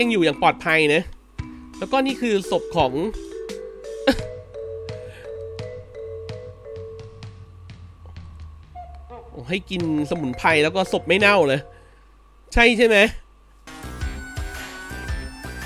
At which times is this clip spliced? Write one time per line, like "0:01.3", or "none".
0:13.7

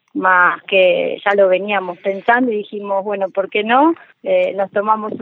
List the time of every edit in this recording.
none

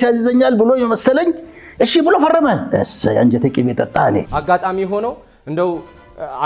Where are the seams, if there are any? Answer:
0:04.3

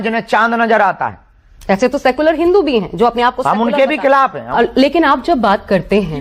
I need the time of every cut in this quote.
0:04.4

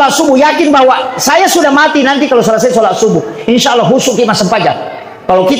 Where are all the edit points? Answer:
none

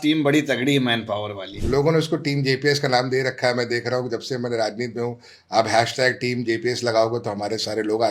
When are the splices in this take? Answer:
0:01.5

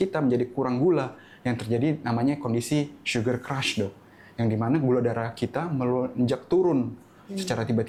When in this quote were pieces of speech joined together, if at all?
none

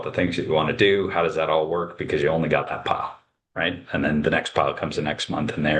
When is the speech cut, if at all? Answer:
none

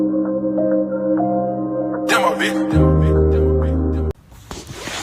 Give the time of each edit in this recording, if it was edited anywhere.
0:04.1

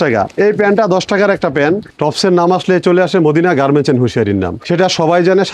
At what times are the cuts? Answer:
0:01.9
0:04.6

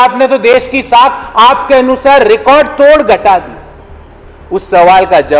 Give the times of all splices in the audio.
none

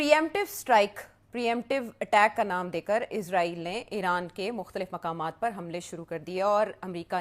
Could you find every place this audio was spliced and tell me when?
none

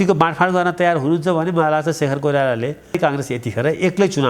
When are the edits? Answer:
0:03.0

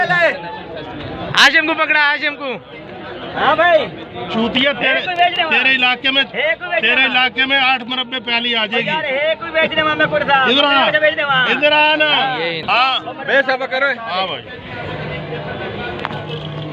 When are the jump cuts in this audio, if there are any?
0:12.6

